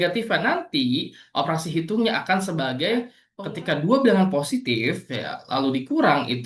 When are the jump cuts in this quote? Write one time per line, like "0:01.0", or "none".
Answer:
0:03.2